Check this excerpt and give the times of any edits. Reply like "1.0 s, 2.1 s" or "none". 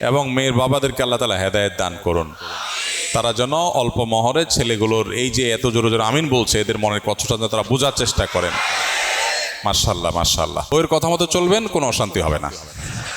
10.7 s